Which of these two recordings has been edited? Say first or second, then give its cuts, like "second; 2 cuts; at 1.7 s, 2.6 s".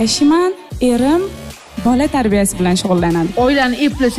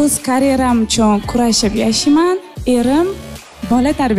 first; 1 cut; at 3.3 s